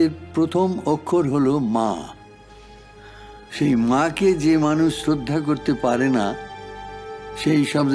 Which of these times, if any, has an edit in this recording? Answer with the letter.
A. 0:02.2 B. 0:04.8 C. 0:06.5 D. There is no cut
D